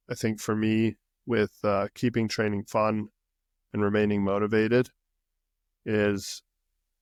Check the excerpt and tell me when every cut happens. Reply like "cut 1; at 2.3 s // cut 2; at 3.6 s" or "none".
none